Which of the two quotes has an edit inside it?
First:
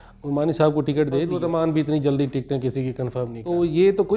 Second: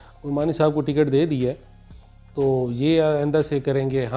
first; 2 cuts; at 1.4 s, 3.4 s

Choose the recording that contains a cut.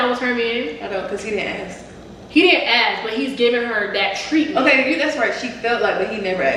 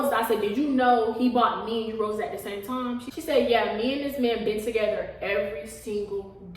second; 1 cut; at 3.1 s

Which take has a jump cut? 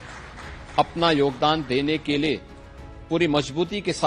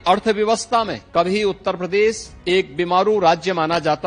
second; 2 cuts; at 1.0 s, 2.3 s

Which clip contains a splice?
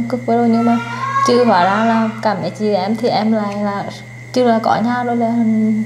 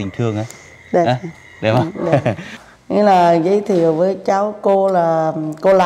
second; 1 cut; at 2.5 s

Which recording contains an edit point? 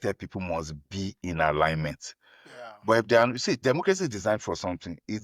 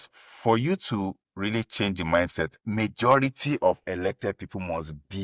second; 2 cuts; at 1.2 s, 2.6 s

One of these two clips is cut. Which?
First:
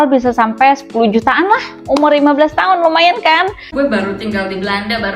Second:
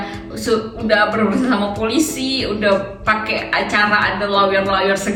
first; 1 cut; at 3.7 s

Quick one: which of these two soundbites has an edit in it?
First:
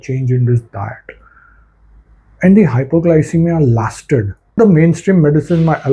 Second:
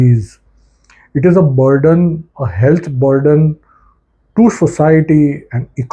first; 1 cut; at 4.6 s

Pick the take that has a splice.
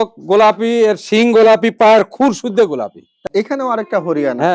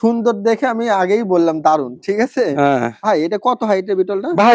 first; 1 cut; at 3.2 s

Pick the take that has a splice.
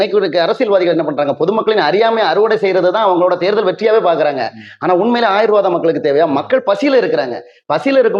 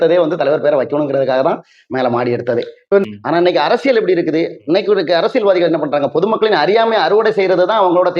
second; 1 cut; at 3.0 s

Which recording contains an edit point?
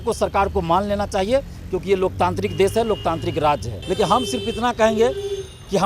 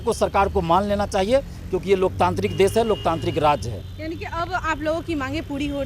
first; 1 cut; at 3.7 s

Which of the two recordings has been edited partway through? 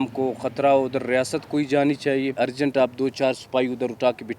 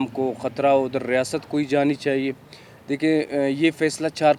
first; 1 cut; at 2.4 s

